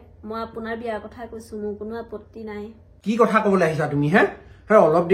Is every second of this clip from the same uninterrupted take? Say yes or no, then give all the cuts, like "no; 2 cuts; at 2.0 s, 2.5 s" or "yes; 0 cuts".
no; 1 cut; at 2.9 s